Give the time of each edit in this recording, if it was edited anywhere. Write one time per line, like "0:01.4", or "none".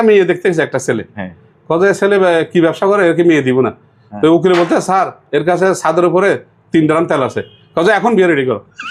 none